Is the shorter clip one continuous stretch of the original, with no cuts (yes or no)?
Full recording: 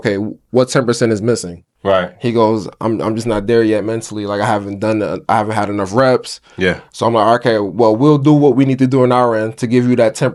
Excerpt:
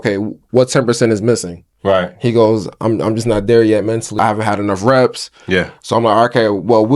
no